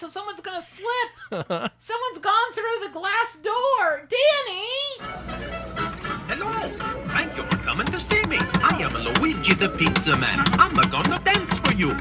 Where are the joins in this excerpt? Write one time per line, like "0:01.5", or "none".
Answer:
0:05.5